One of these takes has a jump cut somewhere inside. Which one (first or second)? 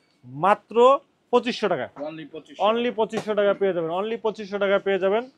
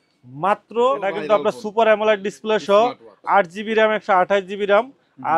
second